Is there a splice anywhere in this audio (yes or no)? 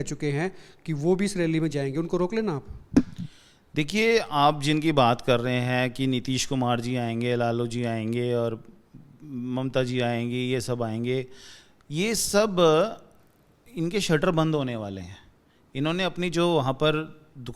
no